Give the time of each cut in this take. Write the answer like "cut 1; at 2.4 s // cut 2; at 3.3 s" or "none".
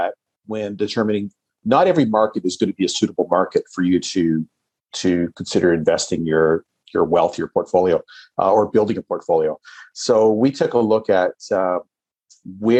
none

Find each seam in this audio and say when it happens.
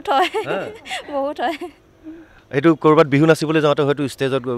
none

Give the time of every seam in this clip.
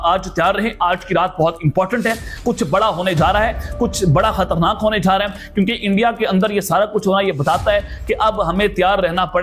none

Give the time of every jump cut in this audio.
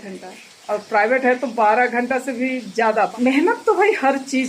cut 1; at 3.1 s

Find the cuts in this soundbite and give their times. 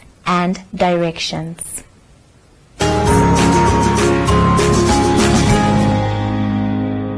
cut 1; at 2.7 s

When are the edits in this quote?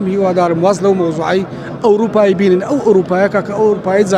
none

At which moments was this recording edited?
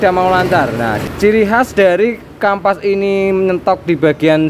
cut 1; at 1.0 s

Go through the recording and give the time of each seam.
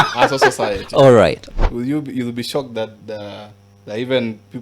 cut 1; at 1.4 s

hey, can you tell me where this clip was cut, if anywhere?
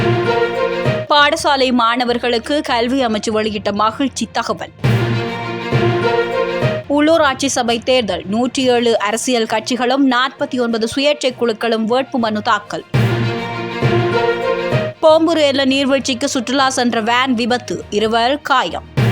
cut 1; at 1.0 s

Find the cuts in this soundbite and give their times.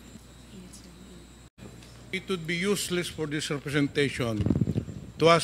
cut 1; at 1.7 s

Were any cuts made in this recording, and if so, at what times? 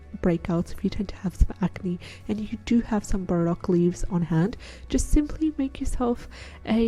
none

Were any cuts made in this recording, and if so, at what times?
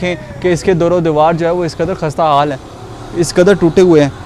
none

